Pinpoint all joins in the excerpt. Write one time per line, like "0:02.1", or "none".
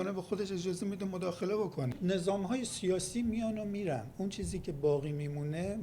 0:02.0